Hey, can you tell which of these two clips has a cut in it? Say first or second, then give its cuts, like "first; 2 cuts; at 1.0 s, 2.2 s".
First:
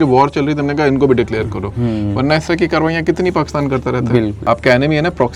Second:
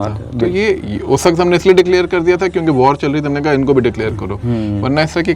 first; 1 cut; at 4.4 s